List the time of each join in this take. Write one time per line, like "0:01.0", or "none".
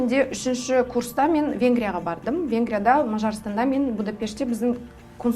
none